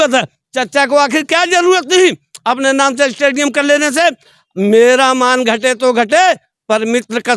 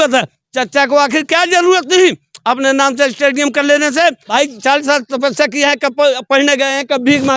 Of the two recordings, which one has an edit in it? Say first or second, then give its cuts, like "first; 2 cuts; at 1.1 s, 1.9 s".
second; 1 cut; at 4.2 s